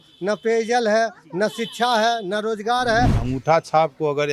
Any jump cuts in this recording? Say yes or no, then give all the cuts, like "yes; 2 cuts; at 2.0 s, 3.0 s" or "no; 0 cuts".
yes; 1 cut; at 3.2 s